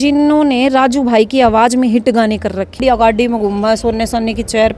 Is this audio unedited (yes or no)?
no